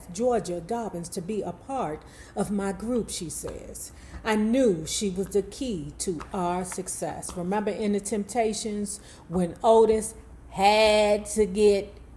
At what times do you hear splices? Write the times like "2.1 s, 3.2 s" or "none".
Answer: none